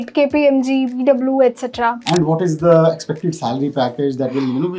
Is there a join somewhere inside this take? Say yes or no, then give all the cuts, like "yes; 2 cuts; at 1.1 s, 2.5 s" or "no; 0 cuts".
yes; 1 cut; at 2.0 s